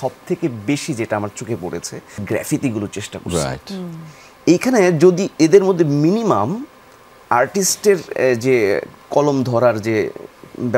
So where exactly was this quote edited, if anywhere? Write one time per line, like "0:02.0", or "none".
0:02.2